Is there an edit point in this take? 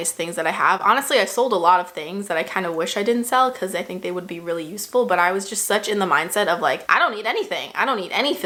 no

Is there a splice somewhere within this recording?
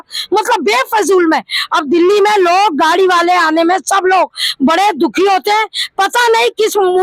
no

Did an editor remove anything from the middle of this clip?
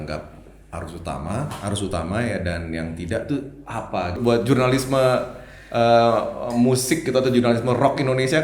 yes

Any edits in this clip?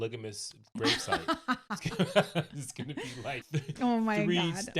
yes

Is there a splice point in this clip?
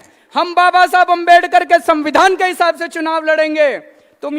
no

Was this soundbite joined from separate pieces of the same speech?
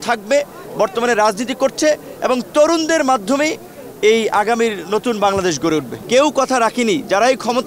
yes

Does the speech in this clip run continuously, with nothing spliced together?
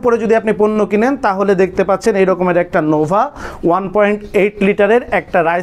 yes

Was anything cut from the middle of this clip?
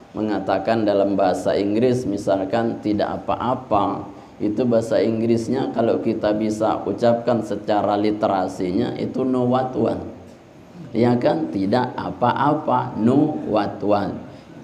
no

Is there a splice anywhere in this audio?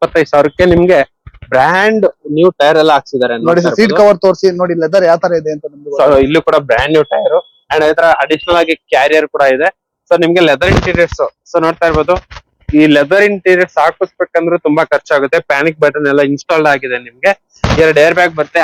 no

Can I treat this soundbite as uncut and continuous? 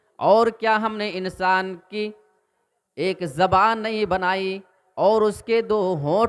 yes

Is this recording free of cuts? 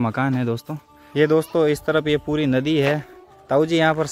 no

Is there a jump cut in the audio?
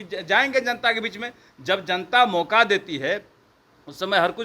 no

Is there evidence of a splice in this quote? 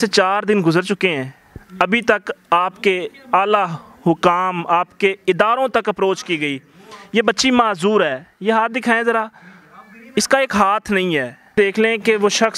yes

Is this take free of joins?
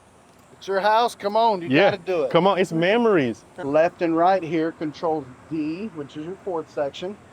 no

